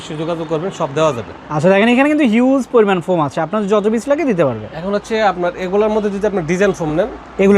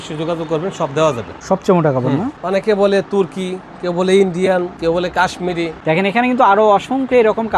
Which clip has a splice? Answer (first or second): second